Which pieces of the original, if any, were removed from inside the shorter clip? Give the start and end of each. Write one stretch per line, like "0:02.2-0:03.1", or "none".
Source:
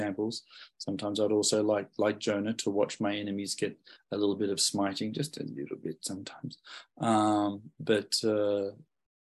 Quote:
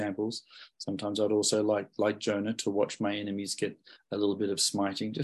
none